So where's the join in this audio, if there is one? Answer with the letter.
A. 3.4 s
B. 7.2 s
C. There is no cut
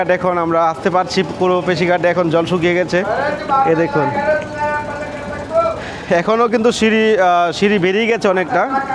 C